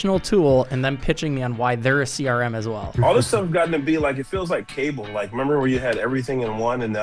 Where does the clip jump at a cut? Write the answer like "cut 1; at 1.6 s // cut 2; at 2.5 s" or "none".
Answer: cut 1; at 2.9 s